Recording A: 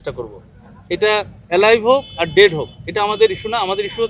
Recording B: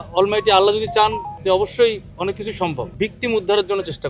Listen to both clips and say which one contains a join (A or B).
B